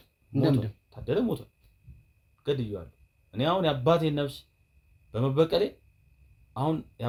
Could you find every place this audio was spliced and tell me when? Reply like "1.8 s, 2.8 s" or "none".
none